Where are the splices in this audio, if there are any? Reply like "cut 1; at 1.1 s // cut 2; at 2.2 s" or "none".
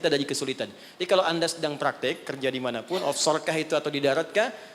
none